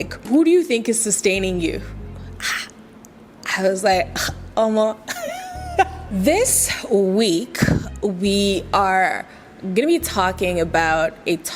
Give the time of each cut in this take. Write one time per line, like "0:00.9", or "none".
0:06.0